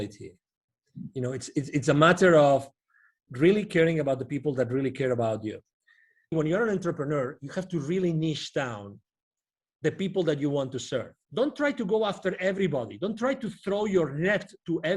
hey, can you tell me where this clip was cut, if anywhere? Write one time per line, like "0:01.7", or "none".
0:06.3
0:11.2